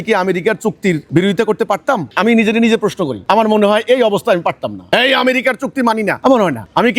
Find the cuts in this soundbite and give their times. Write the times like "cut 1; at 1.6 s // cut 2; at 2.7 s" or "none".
cut 1; at 1.0 s // cut 2; at 2.1 s // cut 3; at 3.2 s // cut 4; at 4.7 s // cut 5; at 6.2 s